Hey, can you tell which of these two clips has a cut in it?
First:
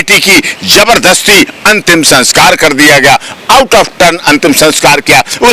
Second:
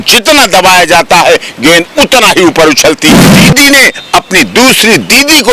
second; 1 cut; at 3.1 s

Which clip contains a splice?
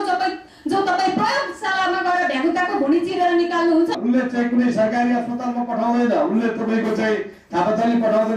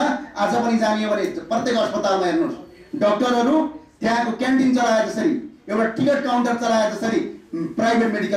first; 1 cut; at 4.0 s

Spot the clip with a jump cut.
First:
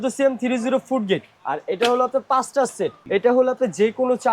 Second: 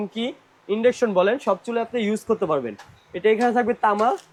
first; 2 cuts; at 1.3 s, 3.0 s

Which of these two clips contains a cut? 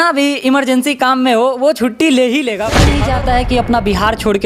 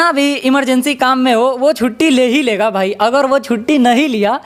first; 1 cut; at 2.9 s

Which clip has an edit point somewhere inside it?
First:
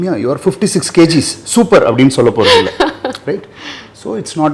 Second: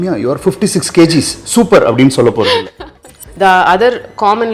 second; 1 cut; at 2.8 s

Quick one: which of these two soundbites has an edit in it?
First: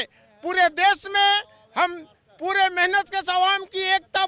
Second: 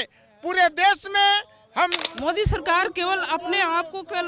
second; 1 cut; at 2.1 s

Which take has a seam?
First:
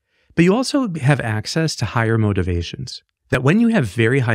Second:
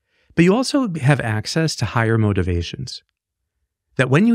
first; 1 cut; at 3.4 s

